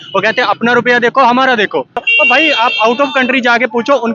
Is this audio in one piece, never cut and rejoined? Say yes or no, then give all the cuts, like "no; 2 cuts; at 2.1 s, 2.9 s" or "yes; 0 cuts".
no; 1 cut; at 2.0 s